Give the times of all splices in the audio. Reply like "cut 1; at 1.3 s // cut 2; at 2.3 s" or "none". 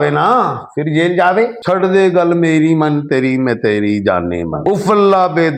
cut 1; at 1.6 s